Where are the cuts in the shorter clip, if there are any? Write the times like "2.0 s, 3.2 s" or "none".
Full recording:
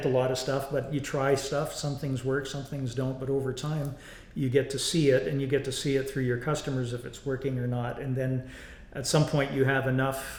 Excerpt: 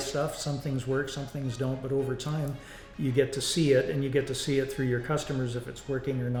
none